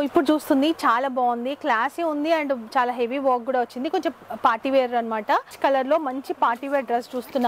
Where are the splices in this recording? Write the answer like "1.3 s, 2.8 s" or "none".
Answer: 5.5 s